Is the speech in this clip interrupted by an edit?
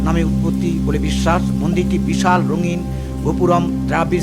no; 0 cuts

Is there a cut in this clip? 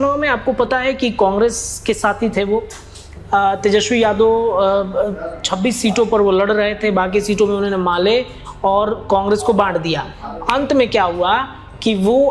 no; 0 cuts

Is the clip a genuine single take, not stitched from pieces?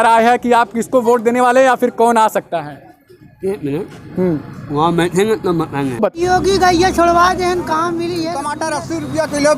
no; 2 cuts; at 6.2 s, 8.5 s

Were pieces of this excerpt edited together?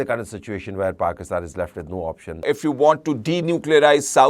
yes; 1 cut; at 2.4 s

